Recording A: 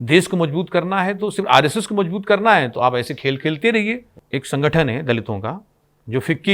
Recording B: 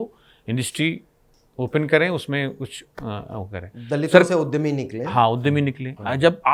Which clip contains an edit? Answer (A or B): A